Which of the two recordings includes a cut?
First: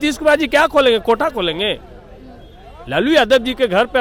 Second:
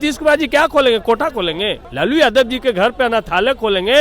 second; 1 cut; at 1.8 s

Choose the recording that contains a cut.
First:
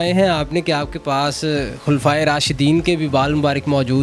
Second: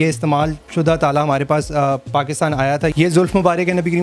second; 1 cut; at 2.9 s

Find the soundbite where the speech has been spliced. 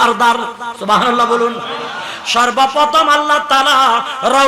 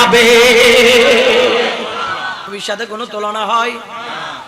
second; 1 cut; at 2.5 s

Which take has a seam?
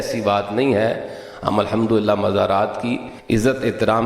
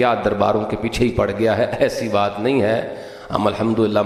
first; 1 cut; at 3.1 s

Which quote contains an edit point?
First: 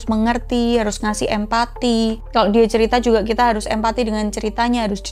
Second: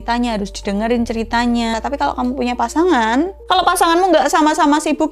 second; 1 cut; at 1.7 s

